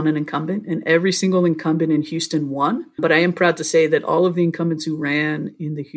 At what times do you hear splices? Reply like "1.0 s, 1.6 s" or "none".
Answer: 2.9 s

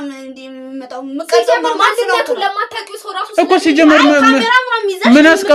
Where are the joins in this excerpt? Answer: none

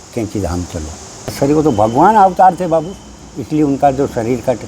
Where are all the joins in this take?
1.3 s

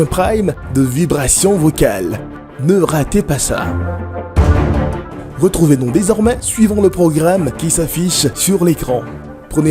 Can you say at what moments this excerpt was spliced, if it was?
3.6 s, 5.2 s

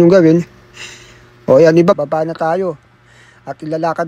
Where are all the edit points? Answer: 2.0 s

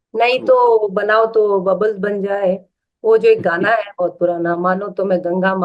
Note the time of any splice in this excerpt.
none

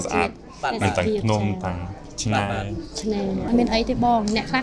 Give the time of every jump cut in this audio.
3.5 s

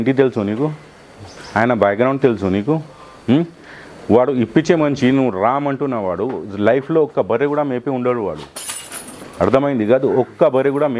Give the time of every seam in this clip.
none

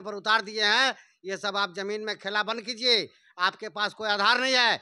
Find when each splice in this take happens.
none

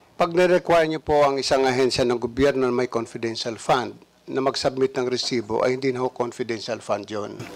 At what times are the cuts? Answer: none

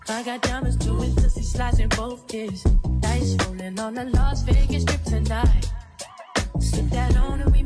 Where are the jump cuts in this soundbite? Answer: none

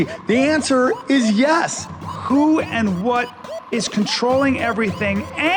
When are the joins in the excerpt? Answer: none

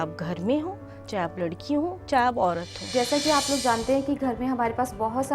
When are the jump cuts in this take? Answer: 2.7 s

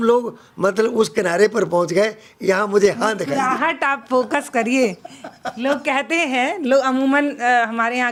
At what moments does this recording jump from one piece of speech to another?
none

